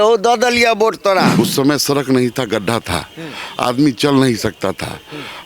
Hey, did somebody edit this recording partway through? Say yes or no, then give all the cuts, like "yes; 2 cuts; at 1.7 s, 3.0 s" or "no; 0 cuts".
yes; 1 cut; at 1.3 s